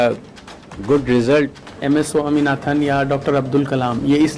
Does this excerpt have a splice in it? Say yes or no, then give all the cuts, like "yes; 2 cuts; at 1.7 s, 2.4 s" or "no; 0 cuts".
yes; 1 cut; at 1.7 s